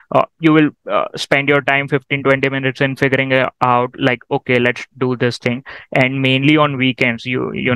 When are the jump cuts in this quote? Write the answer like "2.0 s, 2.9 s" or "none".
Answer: none